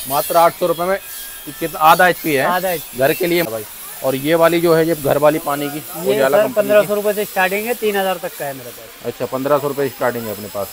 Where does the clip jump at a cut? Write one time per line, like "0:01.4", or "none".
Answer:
0:03.5